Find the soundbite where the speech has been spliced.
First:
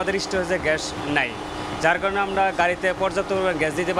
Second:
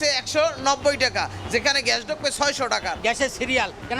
second; 1 cut; at 3.0 s

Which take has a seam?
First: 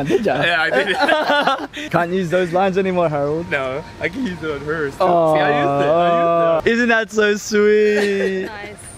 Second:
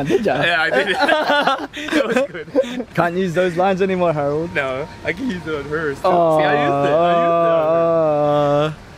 first; 2 cuts; at 1.8 s, 6.6 s

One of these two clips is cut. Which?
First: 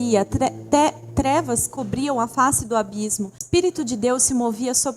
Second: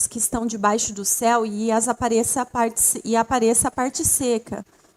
first; 1 cut; at 3.4 s

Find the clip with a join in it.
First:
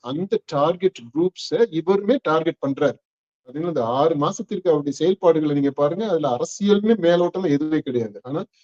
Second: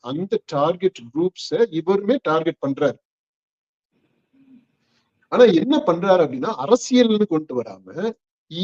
first; 1 cut; at 3.6 s

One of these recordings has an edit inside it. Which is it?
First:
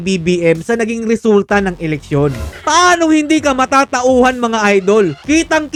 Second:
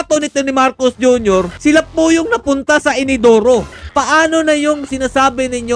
second; 2 cuts; at 1.5 s, 3.9 s

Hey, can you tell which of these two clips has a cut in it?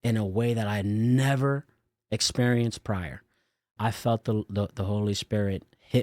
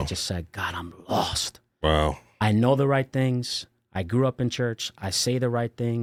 first; 1 cut; at 3.8 s

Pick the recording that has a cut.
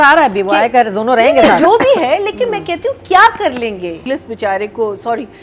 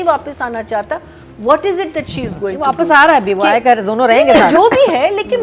first; 1 cut; at 4.0 s

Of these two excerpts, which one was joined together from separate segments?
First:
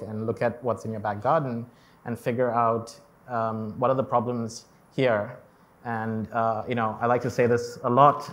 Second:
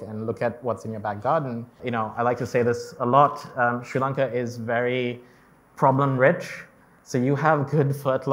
second; 1 cut; at 1.8 s

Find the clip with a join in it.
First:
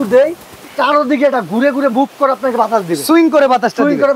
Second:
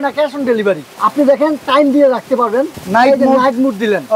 second; 2 cuts; at 1.0 s, 2.8 s

